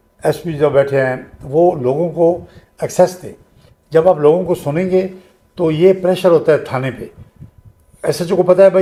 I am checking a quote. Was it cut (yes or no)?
no